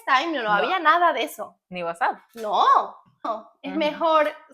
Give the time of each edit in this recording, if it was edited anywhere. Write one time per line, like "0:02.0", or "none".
0:03.3